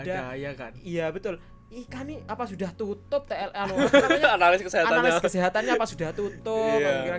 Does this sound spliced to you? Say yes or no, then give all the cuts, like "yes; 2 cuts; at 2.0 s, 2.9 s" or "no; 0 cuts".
no; 0 cuts